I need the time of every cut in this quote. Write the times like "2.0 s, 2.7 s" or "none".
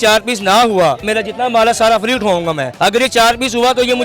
1.1 s, 2.7 s